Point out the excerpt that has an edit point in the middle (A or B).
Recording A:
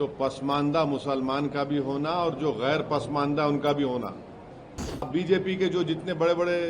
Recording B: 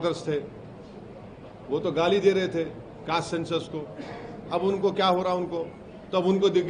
A